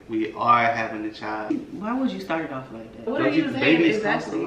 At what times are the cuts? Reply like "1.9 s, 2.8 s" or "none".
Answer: 1.5 s, 3.1 s

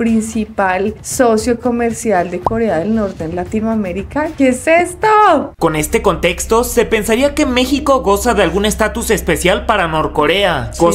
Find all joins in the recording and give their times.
none

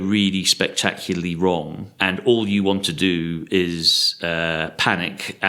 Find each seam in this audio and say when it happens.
1.8 s

